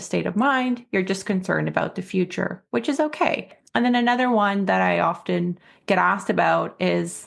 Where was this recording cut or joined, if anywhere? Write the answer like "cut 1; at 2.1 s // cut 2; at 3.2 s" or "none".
cut 1; at 3.6 s